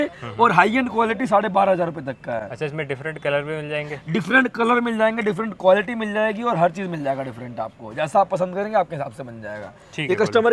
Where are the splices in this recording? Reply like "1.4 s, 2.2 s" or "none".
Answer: none